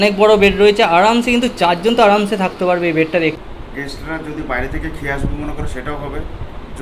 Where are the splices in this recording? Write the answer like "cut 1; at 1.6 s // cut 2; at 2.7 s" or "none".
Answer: cut 1; at 3.4 s